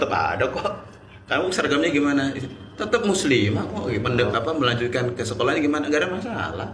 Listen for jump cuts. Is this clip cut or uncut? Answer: cut